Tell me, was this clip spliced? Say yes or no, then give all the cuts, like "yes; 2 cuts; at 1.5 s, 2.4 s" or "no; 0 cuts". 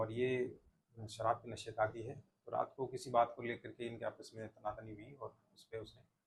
no; 0 cuts